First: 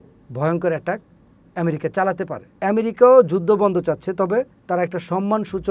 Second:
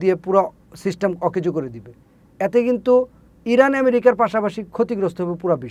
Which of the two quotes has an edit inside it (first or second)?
first